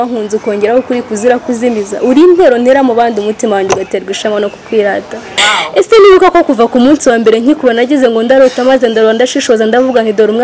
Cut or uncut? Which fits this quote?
cut